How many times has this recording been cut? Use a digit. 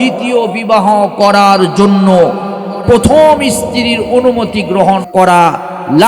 1